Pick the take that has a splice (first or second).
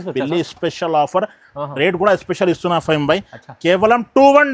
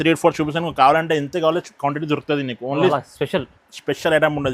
second